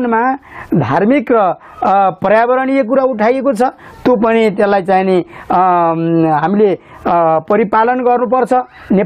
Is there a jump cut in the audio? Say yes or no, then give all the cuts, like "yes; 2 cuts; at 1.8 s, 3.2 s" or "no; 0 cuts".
no; 0 cuts